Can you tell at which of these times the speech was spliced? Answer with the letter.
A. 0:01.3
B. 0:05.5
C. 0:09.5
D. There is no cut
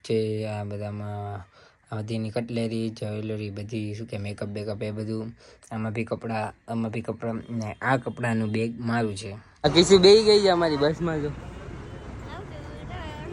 C